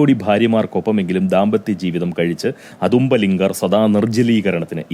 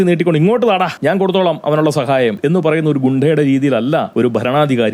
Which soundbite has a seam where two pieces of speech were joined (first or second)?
second